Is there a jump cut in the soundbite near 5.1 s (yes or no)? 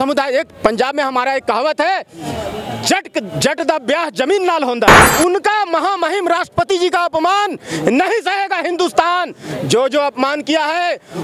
yes